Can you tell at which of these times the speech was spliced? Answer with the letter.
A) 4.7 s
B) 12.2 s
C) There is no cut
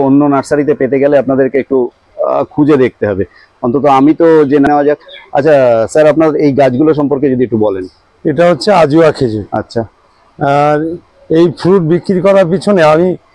A